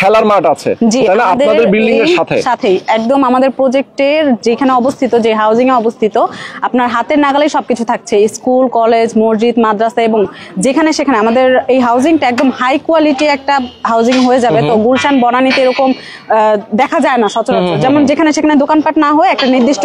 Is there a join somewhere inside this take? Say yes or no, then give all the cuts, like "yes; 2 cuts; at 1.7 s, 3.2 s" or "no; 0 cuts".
no; 0 cuts